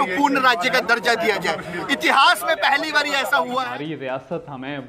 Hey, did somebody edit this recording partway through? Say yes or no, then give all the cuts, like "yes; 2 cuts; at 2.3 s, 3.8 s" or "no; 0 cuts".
yes; 1 cut; at 3.6 s